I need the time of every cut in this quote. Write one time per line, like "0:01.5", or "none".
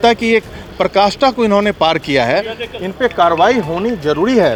none